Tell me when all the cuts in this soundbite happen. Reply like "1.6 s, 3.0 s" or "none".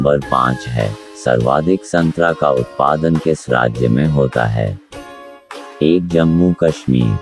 none